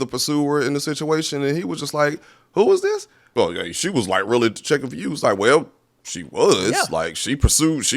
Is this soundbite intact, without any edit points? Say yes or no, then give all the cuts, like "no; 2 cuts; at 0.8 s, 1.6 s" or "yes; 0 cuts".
no; 1 cut; at 3.2 s